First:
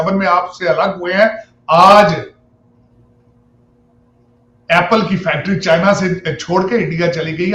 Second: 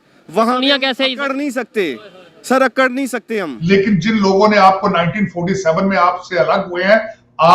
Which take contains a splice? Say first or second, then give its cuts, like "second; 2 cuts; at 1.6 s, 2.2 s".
second; 1 cut; at 3.5 s